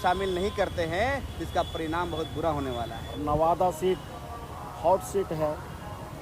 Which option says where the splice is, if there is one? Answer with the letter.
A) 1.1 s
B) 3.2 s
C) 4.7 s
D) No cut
B